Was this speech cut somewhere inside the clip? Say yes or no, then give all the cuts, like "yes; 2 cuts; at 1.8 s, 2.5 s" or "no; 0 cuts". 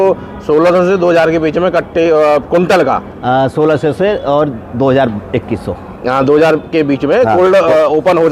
no; 0 cuts